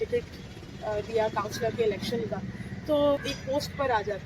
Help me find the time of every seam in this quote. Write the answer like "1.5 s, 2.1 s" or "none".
3.2 s

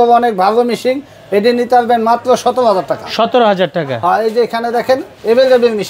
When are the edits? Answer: none

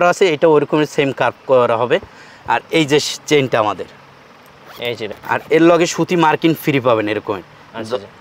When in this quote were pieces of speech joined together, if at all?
5.2 s

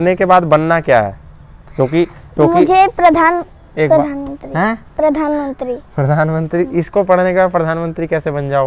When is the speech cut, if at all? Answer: none

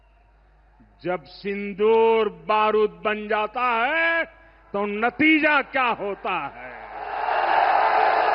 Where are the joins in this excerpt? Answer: none

